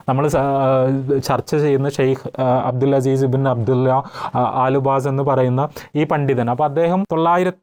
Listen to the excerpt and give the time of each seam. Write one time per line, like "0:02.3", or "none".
none